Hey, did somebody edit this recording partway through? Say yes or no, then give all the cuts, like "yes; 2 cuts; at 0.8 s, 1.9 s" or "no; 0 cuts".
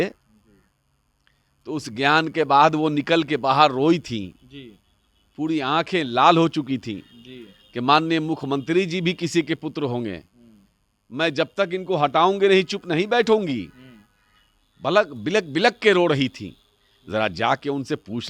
no; 0 cuts